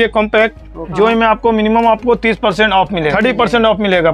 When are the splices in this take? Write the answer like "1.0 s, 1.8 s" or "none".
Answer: 0.9 s, 3.1 s